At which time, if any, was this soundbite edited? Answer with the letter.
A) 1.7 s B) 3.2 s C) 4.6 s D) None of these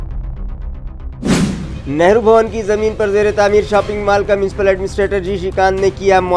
D